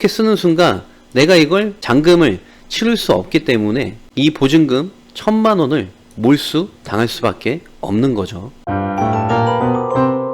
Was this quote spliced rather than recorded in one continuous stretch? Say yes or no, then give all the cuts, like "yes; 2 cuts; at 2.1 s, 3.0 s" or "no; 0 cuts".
yes; 1 cut; at 8.6 s